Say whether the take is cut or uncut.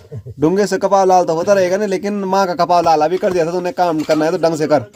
uncut